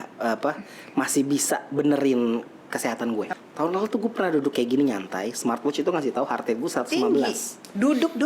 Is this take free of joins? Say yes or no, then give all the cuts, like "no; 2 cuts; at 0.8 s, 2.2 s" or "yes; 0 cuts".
no; 1 cut; at 3.3 s